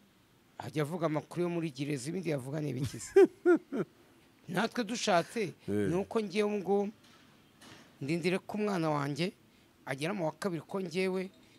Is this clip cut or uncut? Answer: uncut